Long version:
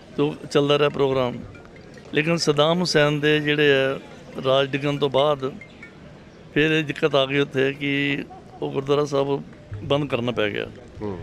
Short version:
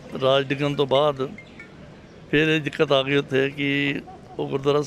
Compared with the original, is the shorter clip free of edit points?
yes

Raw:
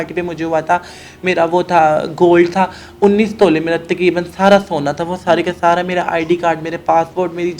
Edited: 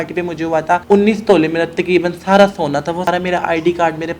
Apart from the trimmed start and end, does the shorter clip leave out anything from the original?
yes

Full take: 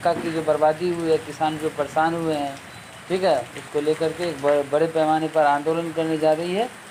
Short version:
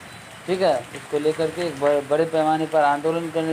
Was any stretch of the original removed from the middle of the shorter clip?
no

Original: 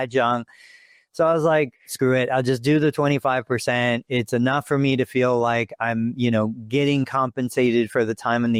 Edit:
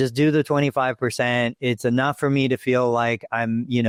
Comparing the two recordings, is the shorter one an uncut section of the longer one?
yes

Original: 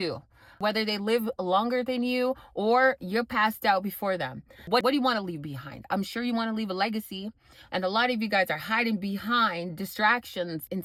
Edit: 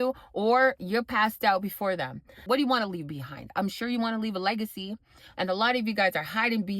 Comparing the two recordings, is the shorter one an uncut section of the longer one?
no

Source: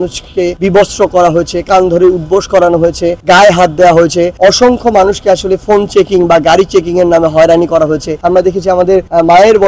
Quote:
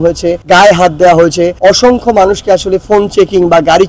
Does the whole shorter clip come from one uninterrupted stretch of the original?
yes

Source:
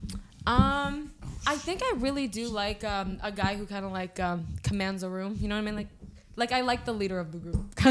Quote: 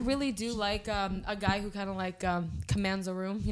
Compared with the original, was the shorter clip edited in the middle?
no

